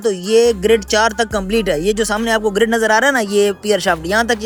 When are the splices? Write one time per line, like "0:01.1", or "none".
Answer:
none